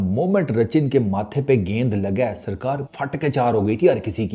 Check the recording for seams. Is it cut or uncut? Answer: cut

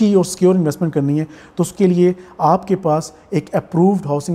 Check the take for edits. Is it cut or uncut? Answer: uncut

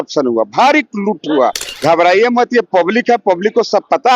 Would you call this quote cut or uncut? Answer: cut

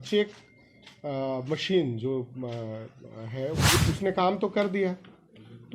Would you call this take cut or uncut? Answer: cut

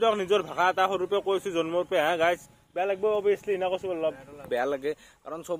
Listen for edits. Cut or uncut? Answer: cut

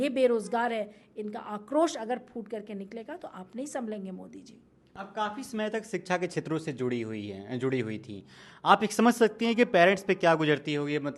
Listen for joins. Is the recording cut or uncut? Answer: uncut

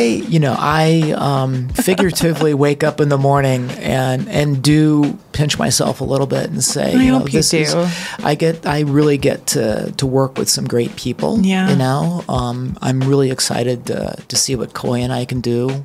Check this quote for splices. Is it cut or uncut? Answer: cut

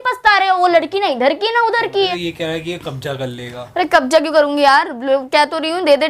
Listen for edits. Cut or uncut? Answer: cut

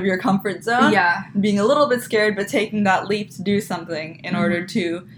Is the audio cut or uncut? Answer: uncut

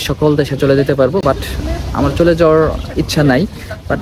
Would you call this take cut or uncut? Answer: uncut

